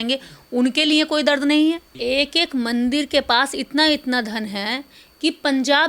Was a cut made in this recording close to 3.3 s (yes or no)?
no